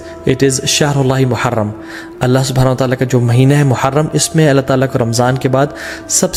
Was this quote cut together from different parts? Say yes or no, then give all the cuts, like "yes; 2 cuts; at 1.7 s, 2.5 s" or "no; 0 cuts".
no; 0 cuts